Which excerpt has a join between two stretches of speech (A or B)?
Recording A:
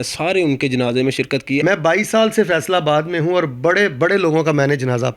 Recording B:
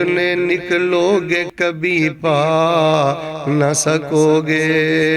A